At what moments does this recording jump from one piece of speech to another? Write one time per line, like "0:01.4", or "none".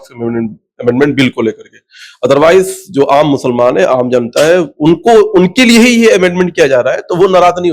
none